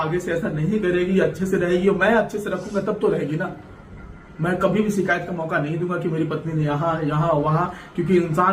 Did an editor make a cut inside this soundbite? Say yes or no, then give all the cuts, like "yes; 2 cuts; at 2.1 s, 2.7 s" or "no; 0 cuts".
no; 0 cuts